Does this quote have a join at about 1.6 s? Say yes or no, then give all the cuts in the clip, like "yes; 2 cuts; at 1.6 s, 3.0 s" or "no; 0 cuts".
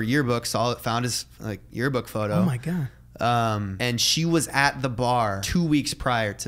no; 2 cuts; at 3.7 s, 5.4 s